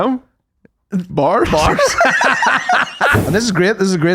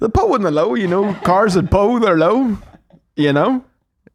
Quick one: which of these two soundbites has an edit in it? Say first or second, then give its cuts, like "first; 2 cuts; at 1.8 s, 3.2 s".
first; 1 cut; at 3.2 s